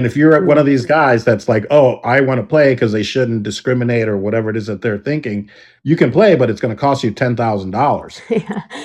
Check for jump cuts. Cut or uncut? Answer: uncut